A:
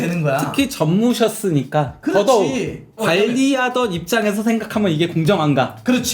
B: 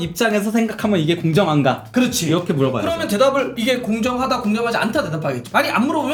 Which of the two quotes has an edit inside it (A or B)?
A